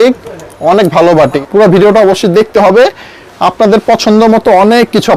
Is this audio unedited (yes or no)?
no